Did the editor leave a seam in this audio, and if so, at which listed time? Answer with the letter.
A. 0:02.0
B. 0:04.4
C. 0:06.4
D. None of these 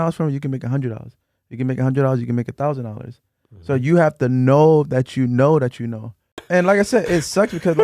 C